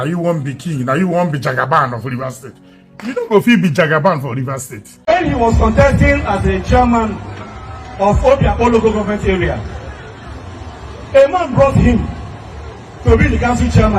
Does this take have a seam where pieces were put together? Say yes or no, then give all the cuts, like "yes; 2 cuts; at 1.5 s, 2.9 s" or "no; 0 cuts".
yes; 1 cut; at 5.1 s